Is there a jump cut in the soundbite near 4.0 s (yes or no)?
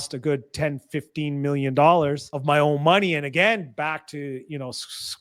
no